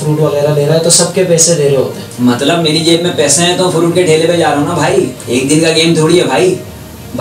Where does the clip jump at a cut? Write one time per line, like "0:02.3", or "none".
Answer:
0:02.0
0:05.2